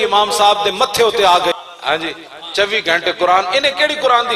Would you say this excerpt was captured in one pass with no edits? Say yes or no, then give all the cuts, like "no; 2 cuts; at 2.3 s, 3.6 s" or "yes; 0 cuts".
no; 1 cut; at 1.6 s